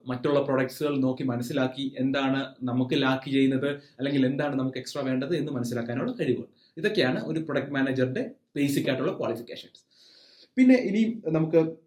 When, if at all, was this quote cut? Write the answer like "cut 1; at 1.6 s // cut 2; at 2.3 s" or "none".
none